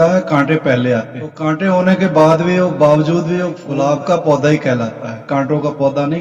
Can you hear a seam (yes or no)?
yes